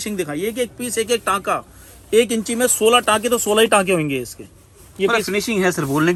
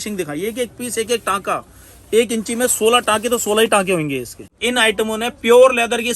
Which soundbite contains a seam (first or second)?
second